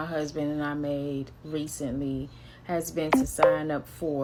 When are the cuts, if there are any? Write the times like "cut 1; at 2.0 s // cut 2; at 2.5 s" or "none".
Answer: none